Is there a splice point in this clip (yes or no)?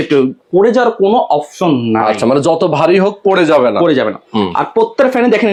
no